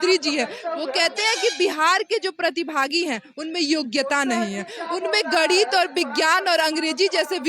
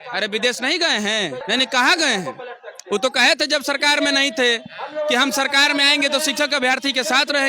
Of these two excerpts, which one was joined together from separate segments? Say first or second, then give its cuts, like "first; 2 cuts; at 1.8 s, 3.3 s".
second; 1 cut; at 1.4 s